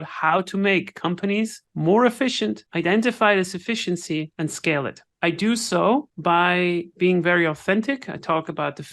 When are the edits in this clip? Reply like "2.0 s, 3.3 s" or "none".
1.6 s, 2.7 s, 4.5 s, 6.1 s